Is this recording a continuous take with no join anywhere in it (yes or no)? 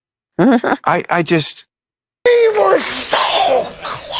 no